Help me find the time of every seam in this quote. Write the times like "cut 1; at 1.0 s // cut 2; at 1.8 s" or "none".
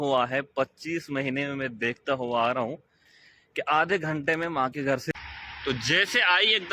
cut 1; at 5.1 s